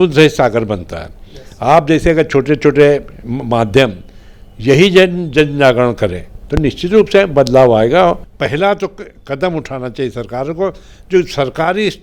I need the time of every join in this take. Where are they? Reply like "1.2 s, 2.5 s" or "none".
8.3 s